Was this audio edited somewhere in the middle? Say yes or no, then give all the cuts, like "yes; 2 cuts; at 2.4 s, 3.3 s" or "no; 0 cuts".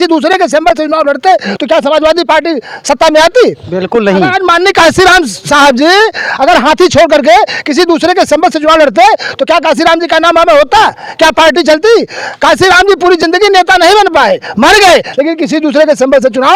no; 0 cuts